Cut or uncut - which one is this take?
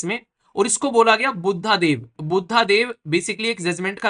uncut